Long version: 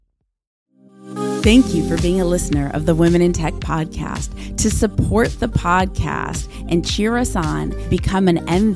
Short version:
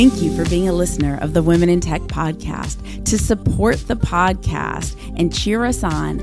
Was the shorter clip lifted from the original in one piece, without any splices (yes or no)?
yes